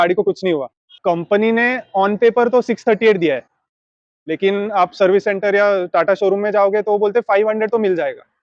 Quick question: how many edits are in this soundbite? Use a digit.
1